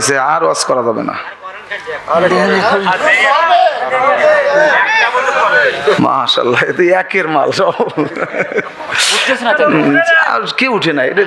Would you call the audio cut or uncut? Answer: uncut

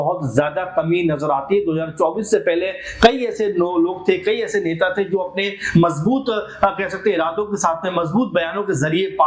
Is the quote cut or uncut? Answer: uncut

